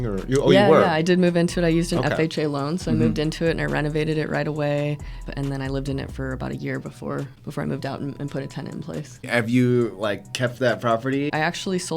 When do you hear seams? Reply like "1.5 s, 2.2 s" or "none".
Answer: 5.3 s, 7.3 s, 9.3 s, 11.3 s